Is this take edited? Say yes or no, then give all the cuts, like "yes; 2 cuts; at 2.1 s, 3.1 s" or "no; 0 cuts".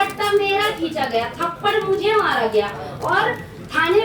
no; 0 cuts